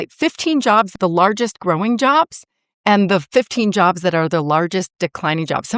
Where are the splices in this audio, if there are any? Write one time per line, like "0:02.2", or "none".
0:00.9